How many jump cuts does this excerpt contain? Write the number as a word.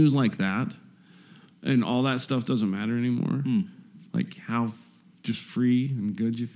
zero